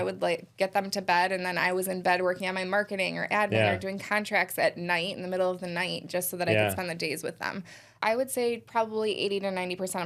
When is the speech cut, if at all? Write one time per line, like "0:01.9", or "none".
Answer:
0:08.0